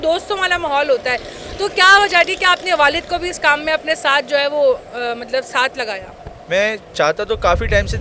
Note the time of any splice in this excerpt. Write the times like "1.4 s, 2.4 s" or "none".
none